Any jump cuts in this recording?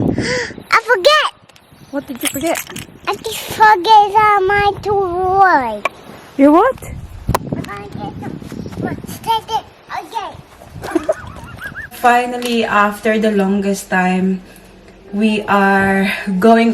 yes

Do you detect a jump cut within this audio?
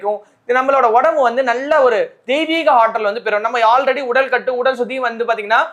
no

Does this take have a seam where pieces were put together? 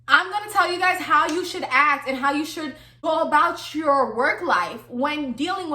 yes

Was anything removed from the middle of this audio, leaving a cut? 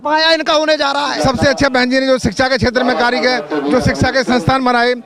yes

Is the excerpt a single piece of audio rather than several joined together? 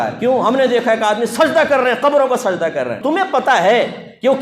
no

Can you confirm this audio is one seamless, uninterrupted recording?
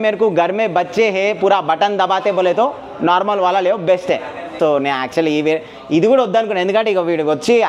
no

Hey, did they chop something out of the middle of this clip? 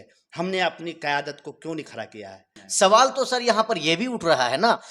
yes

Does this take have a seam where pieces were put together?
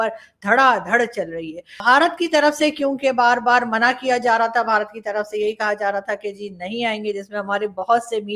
no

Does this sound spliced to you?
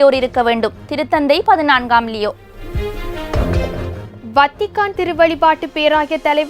no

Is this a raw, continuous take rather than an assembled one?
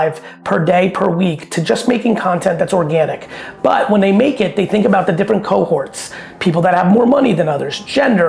yes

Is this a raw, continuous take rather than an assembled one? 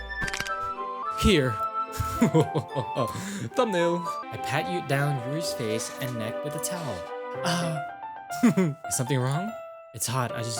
no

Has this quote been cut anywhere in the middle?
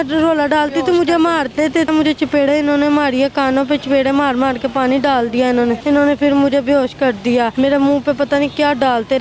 yes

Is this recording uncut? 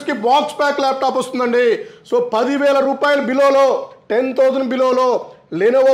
yes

